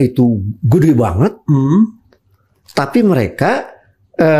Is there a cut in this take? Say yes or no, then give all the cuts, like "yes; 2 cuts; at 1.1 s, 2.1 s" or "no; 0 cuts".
no; 0 cuts